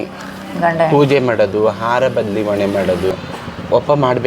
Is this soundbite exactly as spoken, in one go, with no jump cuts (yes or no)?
no